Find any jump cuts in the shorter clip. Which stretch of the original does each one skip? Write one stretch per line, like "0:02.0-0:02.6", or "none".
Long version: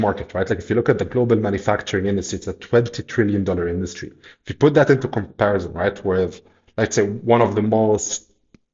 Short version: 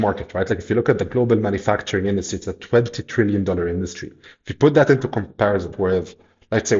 0:05.7-0:06.0